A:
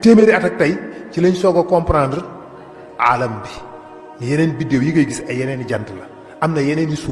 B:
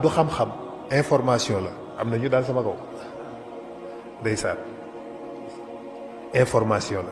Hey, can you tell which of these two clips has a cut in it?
B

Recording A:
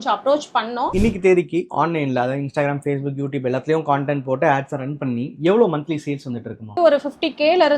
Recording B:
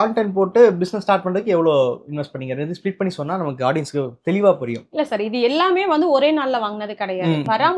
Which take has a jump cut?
A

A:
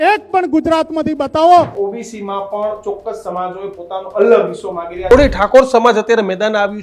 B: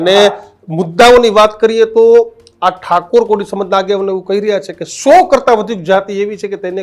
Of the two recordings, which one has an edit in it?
A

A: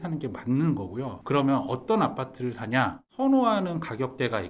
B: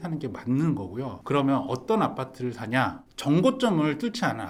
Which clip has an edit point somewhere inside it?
A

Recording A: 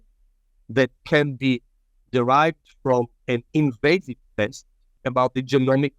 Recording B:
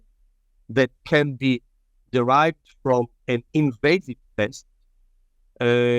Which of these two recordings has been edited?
A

